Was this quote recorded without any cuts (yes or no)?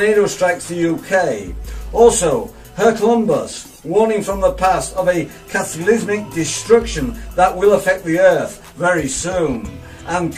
yes